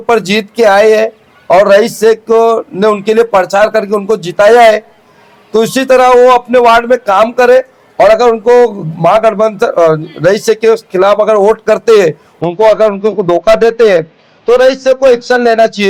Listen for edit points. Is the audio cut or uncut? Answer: uncut